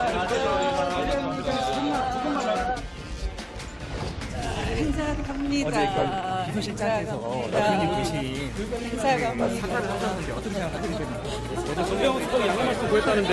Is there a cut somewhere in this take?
yes; 1 cut; at 2.6 s

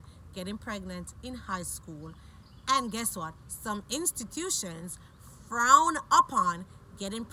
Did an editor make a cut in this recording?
no; 0 cuts

